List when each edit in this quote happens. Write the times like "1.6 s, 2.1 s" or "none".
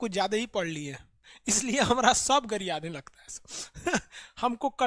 1.3 s